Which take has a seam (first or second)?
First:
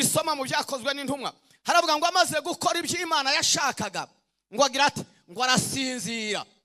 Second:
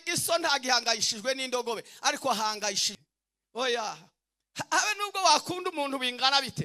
second